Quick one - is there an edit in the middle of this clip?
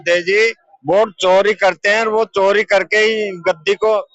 no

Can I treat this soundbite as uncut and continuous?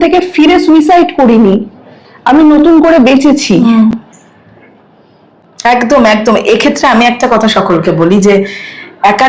yes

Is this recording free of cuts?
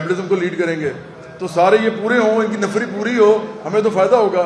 yes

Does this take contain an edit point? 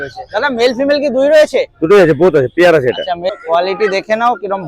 yes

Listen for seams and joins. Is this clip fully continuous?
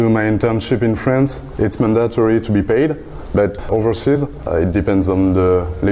no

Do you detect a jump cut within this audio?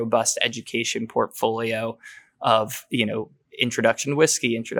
no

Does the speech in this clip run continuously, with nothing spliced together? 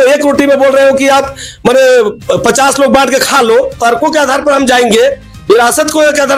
no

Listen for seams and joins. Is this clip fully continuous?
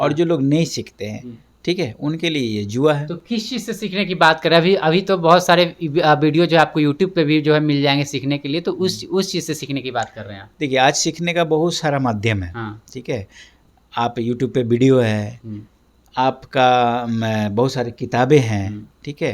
yes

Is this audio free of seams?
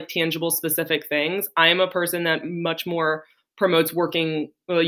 yes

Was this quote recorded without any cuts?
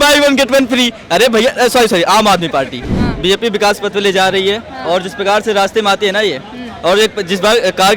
no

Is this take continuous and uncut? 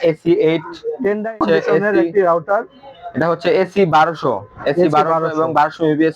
no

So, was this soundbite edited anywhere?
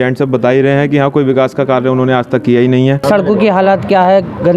yes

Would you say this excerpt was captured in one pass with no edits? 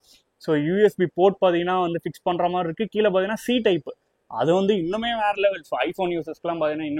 yes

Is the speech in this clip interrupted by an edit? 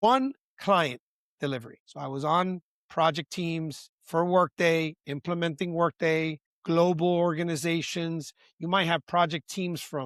no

